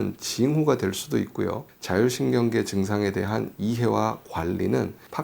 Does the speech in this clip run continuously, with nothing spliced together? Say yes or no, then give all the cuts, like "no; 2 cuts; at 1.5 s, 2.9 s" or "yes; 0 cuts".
no; 1 cut; at 1.7 s